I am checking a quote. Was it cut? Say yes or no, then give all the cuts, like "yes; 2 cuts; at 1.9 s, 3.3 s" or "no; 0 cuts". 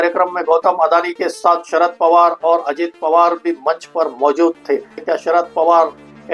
yes; 1 cut; at 5.0 s